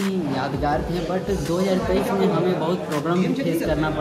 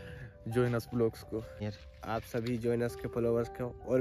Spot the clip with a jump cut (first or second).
second